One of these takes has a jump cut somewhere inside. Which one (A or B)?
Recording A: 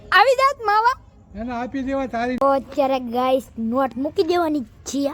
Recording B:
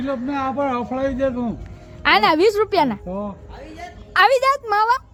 A